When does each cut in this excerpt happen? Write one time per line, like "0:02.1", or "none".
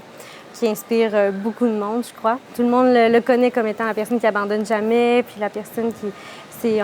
0:02.5